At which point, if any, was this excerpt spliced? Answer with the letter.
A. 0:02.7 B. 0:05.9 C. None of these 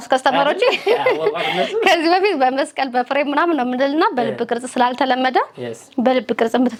C